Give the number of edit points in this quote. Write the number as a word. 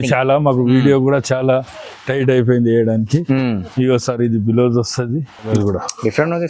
one